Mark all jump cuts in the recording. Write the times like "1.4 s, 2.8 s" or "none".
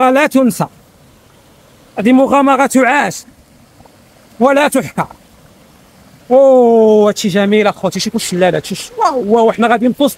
none